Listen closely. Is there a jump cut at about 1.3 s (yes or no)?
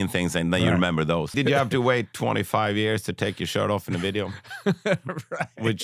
yes